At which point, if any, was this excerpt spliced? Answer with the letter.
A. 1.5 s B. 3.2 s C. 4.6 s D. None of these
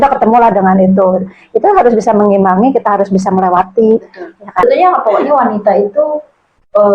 C